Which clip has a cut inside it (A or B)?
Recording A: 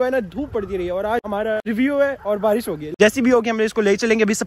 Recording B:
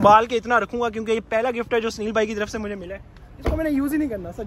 A